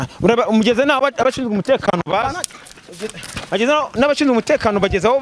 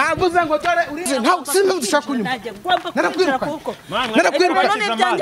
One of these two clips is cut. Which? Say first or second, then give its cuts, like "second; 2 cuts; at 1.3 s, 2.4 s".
second; 1 cut; at 1.1 s